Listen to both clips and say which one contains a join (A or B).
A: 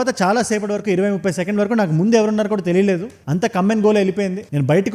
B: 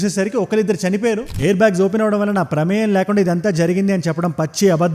B